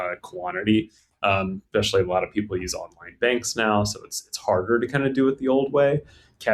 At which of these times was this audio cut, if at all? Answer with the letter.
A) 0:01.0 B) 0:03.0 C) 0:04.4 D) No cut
D